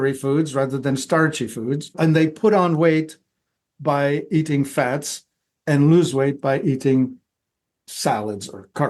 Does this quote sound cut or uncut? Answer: cut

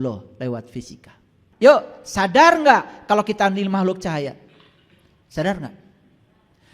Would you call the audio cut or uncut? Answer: cut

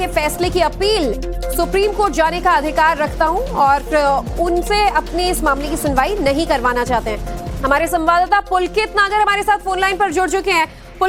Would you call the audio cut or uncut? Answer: uncut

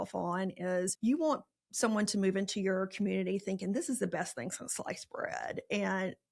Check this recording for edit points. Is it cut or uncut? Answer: cut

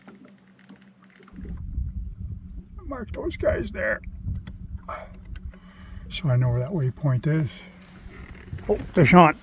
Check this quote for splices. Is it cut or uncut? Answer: cut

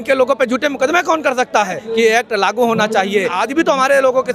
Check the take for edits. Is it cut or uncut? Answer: cut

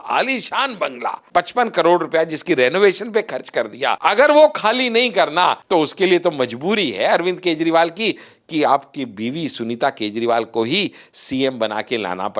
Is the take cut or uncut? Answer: cut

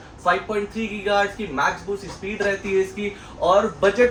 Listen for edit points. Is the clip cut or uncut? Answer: uncut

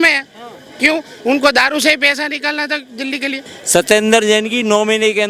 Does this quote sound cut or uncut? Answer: cut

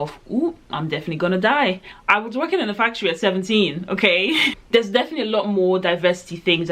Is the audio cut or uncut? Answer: cut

